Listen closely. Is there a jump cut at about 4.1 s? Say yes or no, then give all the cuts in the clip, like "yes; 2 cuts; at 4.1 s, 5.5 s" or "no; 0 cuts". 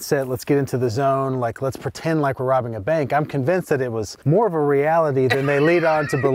yes; 1 cut; at 4.1 s